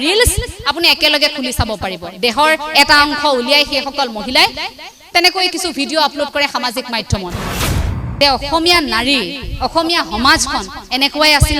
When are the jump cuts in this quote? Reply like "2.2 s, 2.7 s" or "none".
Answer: 7.5 s